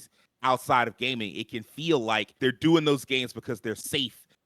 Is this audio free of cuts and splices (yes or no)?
no